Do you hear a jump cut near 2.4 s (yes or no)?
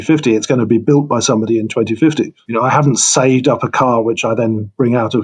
yes